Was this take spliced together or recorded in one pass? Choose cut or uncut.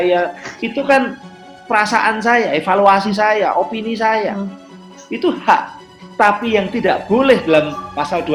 uncut